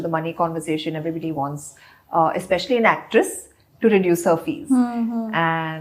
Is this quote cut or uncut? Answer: uncut